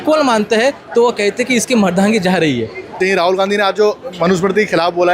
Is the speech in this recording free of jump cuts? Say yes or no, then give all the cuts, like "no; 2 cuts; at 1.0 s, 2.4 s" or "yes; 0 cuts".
no; 1 cut; at 2.9 s